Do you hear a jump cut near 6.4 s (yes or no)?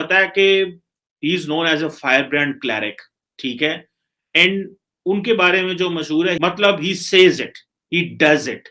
yes